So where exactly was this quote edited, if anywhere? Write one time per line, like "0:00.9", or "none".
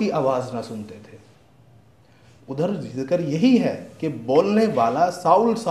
none